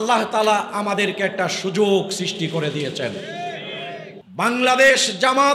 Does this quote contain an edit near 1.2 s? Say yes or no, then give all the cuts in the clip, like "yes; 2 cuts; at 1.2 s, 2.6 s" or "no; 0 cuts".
no; 1 cut; at 4.2 s